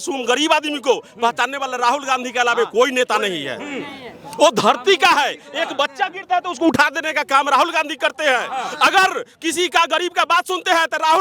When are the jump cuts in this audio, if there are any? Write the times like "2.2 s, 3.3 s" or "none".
none

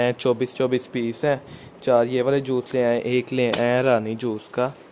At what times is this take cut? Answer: none

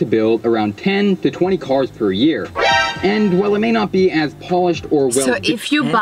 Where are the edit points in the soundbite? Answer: none

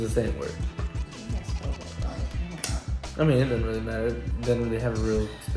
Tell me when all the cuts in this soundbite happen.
4.3 s

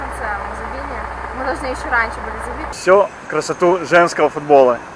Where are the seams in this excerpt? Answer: 2.7 s

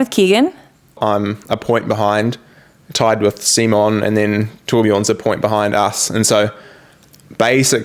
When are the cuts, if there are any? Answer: 1.0 s

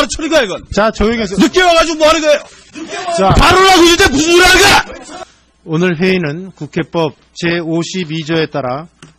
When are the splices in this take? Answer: 5.0 s

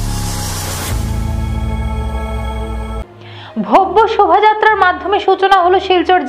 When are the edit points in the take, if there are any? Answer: 3.0 s

